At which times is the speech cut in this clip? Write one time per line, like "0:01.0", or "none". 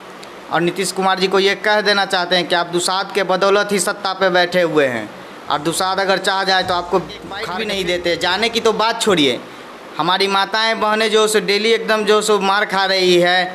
0:07.5